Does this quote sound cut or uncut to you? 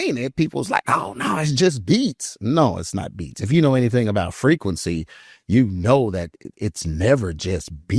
uncut